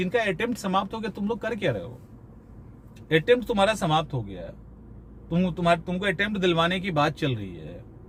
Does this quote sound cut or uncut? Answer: uncut